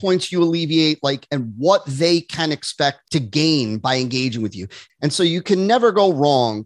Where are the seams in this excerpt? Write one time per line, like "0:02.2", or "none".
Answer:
0:04.7